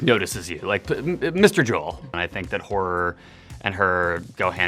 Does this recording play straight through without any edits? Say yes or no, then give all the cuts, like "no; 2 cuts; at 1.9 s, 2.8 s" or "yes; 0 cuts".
no; 1 cut; at 2.2 s